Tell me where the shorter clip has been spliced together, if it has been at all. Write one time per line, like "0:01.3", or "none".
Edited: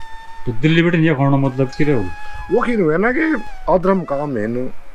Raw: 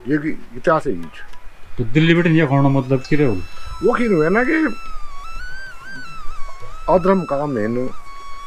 0:03.5